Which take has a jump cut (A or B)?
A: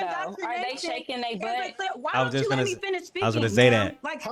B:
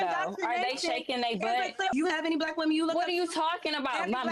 B